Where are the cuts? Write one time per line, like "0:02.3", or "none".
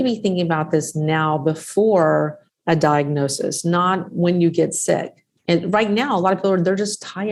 none